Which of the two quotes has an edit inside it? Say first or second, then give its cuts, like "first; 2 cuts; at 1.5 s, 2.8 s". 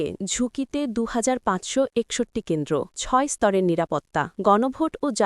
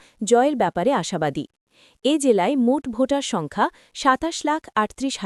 first; 2 cuts; at 3.0 s, 4.3 s